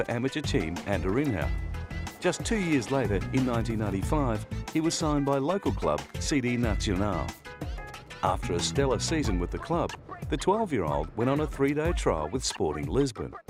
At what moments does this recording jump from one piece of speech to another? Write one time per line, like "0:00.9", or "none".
none